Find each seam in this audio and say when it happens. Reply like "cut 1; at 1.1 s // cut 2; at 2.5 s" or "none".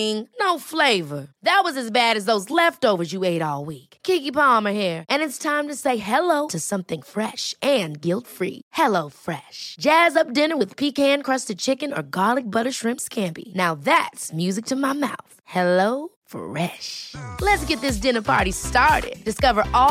none